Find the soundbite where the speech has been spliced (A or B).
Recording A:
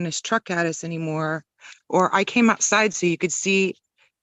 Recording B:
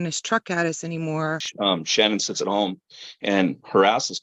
B